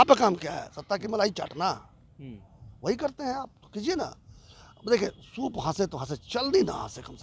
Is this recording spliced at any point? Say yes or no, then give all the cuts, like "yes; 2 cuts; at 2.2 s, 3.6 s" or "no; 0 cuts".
no; 0 cuts